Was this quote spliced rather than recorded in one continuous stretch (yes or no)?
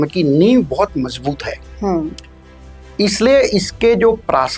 no